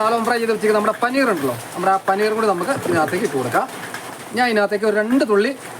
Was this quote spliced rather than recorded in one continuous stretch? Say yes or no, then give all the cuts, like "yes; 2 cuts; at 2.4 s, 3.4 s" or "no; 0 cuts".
yes; 1 cut; at 4.1 s